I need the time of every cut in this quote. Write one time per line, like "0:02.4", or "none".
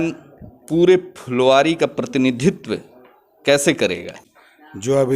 0:04.2